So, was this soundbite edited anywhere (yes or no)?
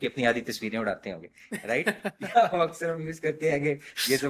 no